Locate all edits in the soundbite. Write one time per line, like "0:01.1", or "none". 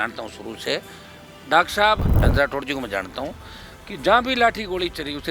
0:02.1